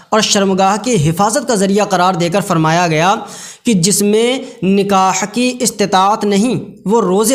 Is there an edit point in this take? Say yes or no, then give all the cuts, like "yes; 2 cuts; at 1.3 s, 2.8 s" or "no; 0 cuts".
no; 0 cuts